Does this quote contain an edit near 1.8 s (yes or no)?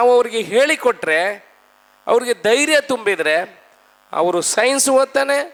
no